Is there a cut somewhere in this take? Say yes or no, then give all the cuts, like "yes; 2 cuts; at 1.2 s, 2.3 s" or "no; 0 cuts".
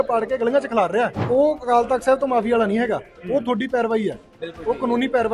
yes; 1 cut; at 1.2 s